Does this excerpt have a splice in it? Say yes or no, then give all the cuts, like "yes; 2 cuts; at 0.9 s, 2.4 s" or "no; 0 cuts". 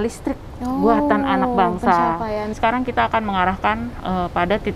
yes; 1 cut; at 2.6 s